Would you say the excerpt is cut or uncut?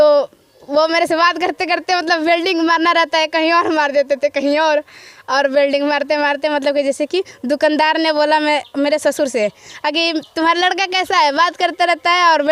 uncut